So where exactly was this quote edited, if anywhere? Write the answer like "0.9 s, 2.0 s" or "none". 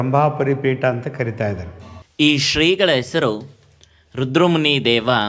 2.1 s